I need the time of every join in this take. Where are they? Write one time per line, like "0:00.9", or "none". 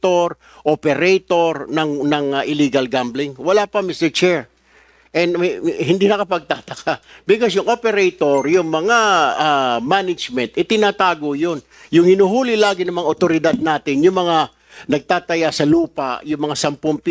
none